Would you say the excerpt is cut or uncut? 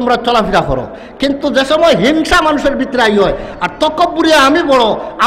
uncut